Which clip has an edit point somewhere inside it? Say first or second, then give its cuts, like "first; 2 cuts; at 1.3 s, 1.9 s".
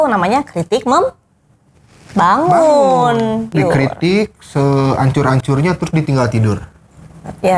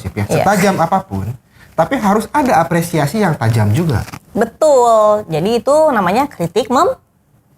first; 1 cut; at 3.5 s